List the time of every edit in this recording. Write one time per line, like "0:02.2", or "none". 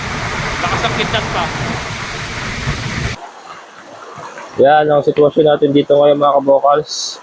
0:03.2